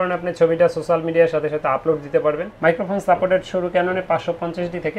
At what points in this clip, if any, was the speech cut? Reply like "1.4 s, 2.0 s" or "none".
2.5 s